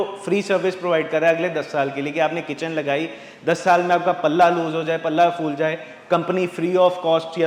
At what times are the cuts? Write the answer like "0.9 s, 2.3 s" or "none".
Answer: none